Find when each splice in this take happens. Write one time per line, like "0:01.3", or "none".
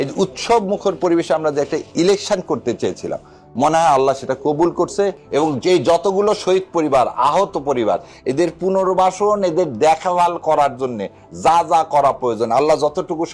0:05.2